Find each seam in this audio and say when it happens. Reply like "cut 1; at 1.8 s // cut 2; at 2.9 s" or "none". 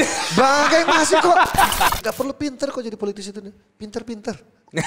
cut 1; at 1.9 s